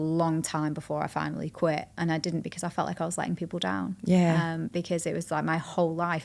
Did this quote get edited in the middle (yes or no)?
no